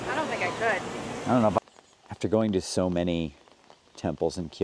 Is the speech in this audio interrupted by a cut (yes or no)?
yes